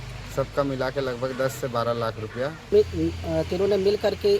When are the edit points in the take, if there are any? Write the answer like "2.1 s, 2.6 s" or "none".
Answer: 2.7 s